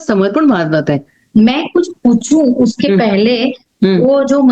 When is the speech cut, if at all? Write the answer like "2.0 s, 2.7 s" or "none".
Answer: 1.3 s